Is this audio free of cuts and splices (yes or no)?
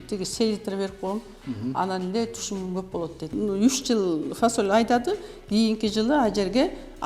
no